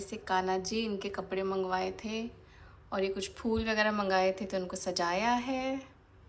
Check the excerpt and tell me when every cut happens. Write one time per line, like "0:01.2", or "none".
none